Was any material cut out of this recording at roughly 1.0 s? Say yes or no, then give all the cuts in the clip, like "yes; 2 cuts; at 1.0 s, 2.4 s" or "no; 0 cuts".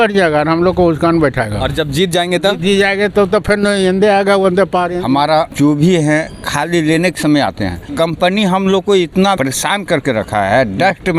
no; 3 cuts; at 5.0 s, 7.8 s, 9.4 s